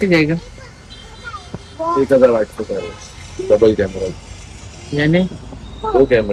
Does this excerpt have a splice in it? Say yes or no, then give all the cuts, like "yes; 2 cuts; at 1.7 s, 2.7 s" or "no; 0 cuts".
no; 0 cuts